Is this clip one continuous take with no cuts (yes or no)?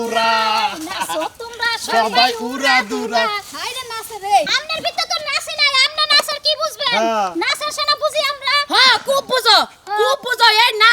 no